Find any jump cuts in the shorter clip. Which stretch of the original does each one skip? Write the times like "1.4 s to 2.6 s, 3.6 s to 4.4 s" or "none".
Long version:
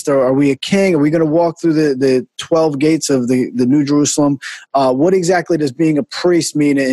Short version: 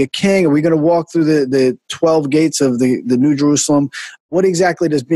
4.7 s to 4.9 s